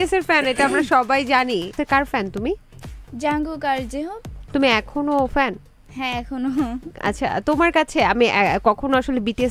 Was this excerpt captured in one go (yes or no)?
no